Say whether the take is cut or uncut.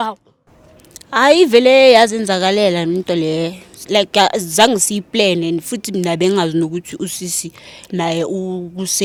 uncut